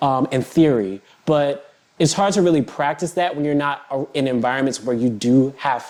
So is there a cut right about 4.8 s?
no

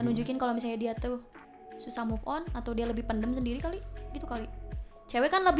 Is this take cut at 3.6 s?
no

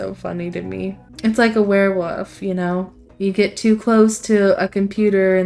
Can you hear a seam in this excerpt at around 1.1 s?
yes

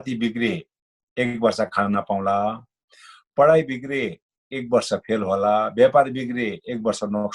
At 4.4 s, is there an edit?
no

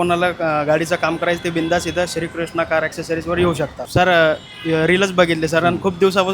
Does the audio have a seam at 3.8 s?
yes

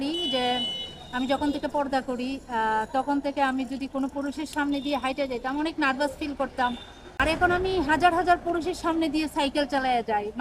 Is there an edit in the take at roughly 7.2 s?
yes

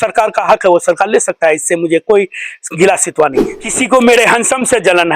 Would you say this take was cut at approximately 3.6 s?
yes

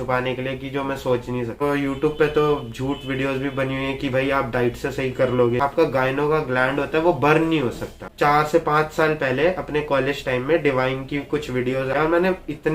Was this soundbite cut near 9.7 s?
no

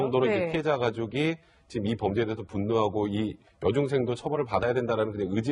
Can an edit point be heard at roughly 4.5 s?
no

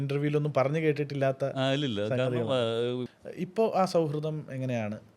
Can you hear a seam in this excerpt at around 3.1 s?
yes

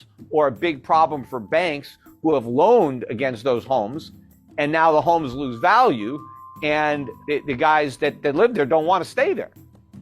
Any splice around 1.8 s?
no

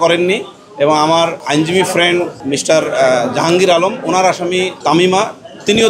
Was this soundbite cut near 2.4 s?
yes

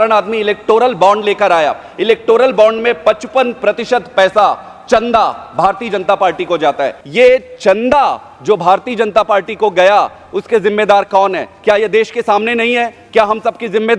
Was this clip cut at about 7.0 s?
yes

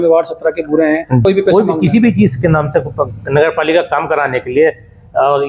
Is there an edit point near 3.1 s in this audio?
no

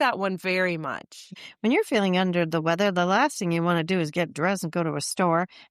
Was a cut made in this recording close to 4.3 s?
no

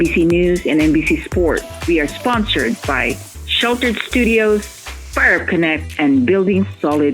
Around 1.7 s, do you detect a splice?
yes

